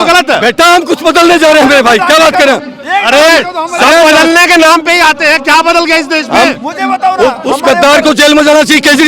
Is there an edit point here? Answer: no; 0 cuts

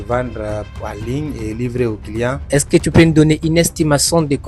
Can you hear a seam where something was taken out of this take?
yes; 1 cut; at 2.5 s

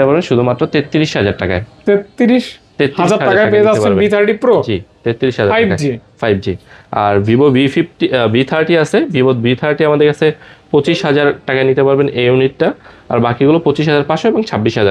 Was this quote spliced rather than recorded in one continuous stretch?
no; 0 cuts

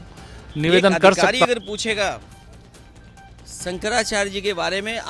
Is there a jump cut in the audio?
yes; 1 cut; at 1.5 s

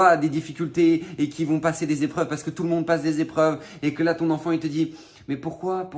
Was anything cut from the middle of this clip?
no; 0 cuts

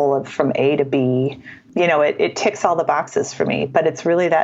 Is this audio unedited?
no; 1 cut; at 1.4 s

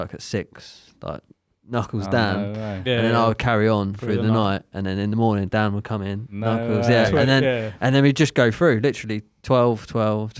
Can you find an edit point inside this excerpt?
no; 0 cuts

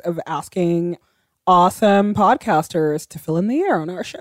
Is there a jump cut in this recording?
yes; 2 cuts; at 1.0 s, 3.0 s

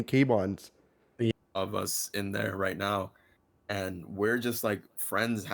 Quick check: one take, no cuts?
no; 1 cut; at 1.3 s

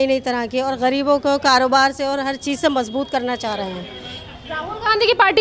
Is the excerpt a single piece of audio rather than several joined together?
yes; 0 cuts

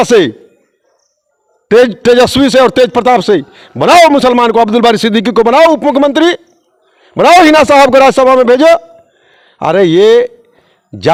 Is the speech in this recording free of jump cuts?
yes; 0 cuts

